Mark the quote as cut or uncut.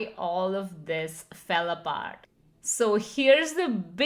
cut